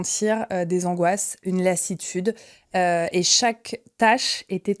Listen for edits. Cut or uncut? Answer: uncut